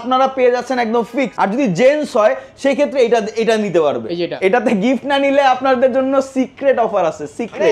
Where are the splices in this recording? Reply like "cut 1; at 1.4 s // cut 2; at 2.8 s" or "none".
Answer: cut 1; at 1.3 s // cut 2; at 4.3 s